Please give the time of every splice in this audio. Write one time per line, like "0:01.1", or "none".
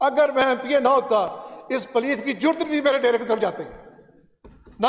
none

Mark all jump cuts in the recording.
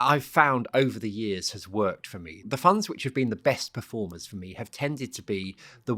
0:02.4

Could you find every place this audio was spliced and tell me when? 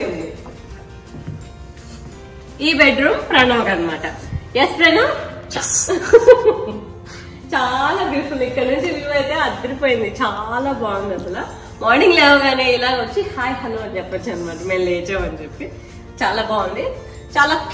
none

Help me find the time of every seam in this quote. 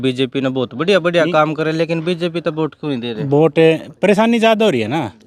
none

